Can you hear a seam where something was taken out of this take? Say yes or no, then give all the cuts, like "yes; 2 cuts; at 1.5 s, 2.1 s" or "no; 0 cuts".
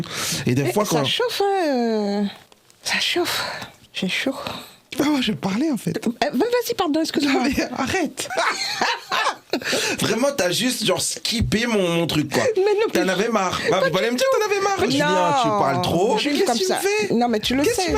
yes; 4 cuts; at 4.8 s, 8.2 s, 14.9 s, 16.3 s